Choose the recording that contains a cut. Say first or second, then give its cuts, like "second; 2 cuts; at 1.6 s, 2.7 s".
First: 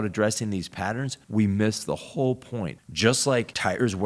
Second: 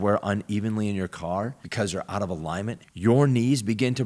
first; 2 cuts; at 1.1 s, 2.8 s